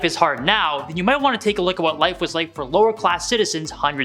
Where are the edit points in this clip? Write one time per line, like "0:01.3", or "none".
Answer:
none